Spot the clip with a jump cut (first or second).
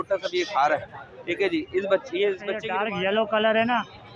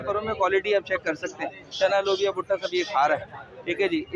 first